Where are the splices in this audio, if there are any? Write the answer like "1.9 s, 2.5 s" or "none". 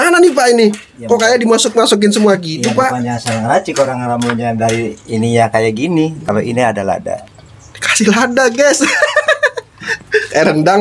none